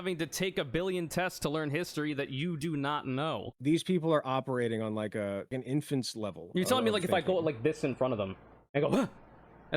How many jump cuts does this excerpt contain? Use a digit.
2